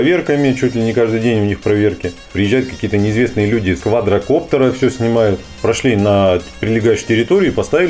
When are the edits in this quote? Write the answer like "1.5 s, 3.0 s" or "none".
2.3 s, 3.8 s, 5.5 s